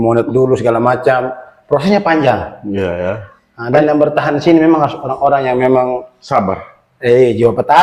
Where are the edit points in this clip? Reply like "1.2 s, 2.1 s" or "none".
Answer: none